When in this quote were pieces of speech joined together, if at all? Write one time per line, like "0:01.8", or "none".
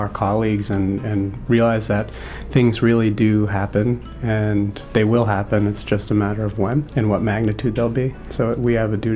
0:04.8
0:06.9
0:08.2